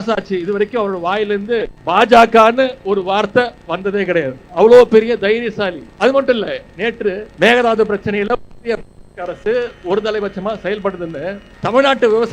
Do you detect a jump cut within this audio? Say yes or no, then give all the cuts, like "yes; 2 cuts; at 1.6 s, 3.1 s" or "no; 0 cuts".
yes; 5 cuts; at 1.7 s, 4.4 s, 5.9 s, 7.3 s, 11.5 s